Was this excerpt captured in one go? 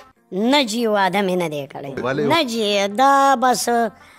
no; 1 cut; at 2.2 s

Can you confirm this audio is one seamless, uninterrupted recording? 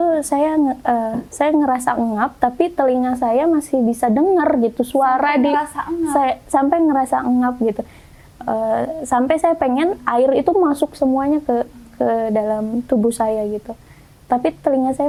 yes; 0 cuts

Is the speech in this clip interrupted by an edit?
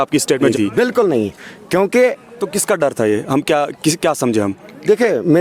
no; 0 cuts

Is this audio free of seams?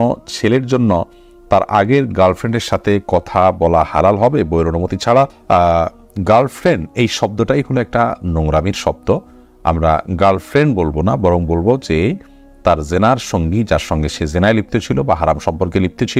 yes; 0 cuts

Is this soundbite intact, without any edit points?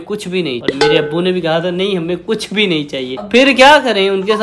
yes; 0 cuts

